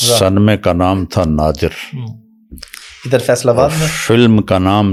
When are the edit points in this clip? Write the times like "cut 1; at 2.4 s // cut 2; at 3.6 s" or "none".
none